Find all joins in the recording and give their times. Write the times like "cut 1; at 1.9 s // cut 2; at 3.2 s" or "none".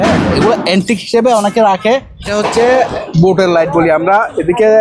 cut 1; at 2.3 s